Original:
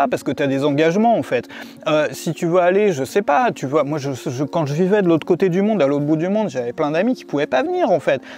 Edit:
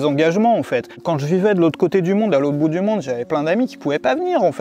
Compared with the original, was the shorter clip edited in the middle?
yes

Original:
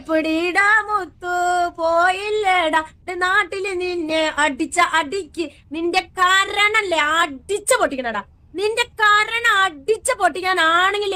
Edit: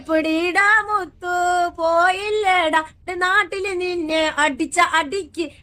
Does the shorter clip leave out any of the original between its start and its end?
no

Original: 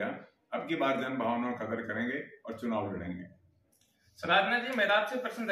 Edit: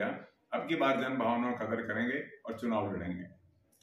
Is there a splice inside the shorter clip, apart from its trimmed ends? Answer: no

